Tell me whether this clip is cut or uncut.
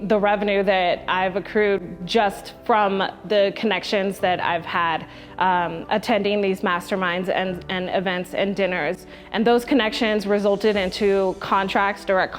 uncut